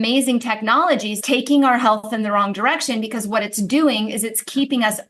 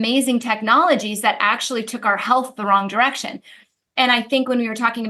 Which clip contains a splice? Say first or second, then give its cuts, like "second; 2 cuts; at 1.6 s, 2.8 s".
first; 1 cut; at 1.2 s